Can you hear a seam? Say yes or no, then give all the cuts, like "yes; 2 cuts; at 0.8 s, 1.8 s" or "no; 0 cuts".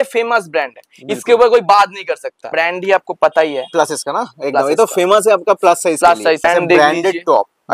yes; 2 cuts; at 2.5 s, 6.5 s